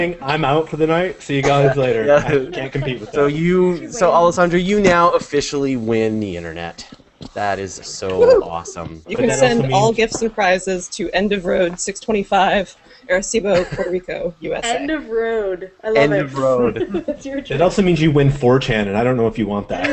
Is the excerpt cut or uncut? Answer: cut